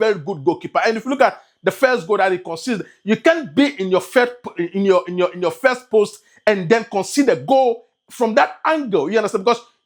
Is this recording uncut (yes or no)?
yes